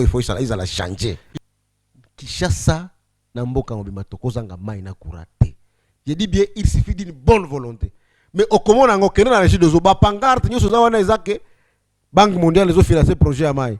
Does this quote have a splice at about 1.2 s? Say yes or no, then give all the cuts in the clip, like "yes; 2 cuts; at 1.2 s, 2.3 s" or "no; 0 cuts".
yes; 1 cut; at 1.2 s